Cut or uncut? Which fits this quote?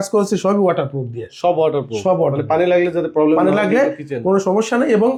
uncut